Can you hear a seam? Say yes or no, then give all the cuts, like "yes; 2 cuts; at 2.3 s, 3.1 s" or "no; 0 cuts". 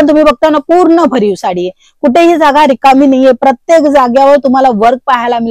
no; 0 cuts